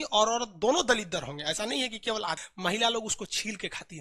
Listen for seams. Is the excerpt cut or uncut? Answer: cut